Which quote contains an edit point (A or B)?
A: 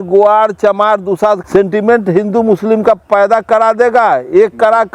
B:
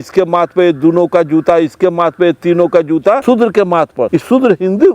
B